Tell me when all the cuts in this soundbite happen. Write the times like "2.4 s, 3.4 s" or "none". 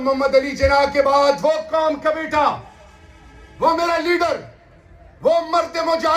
none